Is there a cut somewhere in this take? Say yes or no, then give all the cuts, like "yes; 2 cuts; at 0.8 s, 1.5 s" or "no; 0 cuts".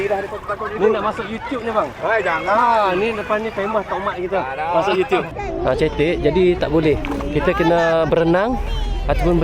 yes; 1 cut; at 5.3 s